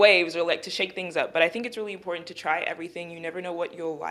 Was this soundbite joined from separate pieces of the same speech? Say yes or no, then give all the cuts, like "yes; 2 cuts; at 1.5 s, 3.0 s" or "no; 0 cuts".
no; 0 cuts